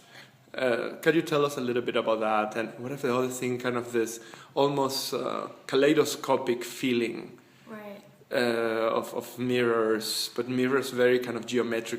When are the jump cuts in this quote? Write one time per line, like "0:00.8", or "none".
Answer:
0:09.1